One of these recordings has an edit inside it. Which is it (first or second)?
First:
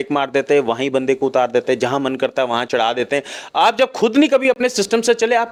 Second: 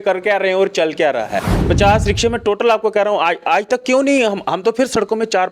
second